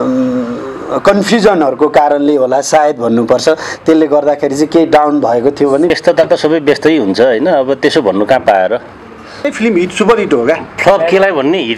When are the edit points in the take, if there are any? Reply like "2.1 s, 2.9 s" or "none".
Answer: 5.9 s, 9.5 s